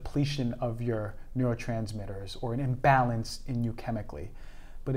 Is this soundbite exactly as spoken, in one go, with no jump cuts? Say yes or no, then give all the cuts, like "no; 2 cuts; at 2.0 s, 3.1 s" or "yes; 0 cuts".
yes; 0 cuts